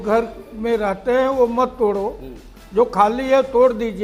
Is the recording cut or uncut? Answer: uncut